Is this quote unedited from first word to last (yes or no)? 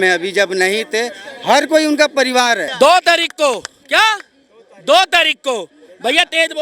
no